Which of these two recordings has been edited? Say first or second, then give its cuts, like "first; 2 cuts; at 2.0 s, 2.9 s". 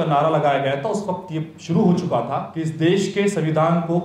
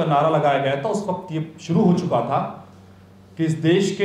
first; 1 cut; at 2.5 s